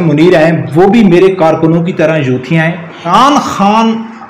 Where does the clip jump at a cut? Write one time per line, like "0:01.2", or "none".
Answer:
0:03.1